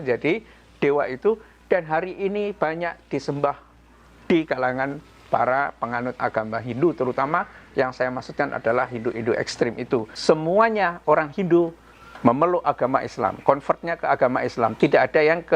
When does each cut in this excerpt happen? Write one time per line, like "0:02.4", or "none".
0:10.1